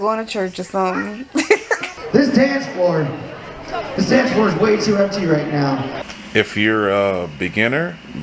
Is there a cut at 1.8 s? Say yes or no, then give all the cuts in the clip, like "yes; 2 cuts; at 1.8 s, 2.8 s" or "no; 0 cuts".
yes; 2 cuts; at 1.8 s, 5.9 s